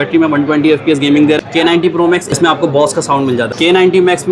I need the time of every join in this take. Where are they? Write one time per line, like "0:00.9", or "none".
0:01.9
0:03.5